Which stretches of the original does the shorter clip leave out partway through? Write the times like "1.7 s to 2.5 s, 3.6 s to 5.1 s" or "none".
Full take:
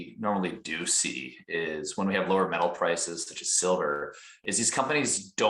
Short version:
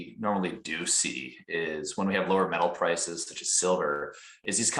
none